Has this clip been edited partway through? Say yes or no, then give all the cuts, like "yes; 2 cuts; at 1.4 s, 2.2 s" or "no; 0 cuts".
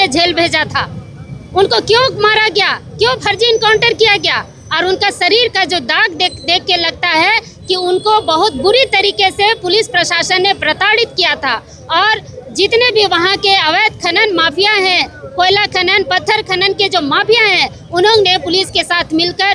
no; 0 cuts